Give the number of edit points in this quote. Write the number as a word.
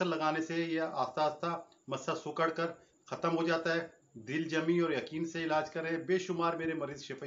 zero